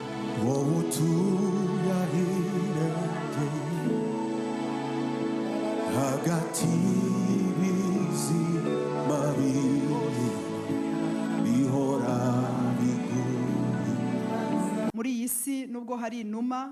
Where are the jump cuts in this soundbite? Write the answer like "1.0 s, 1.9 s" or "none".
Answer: 14.9 s